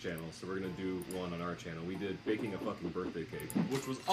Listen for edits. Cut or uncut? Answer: cut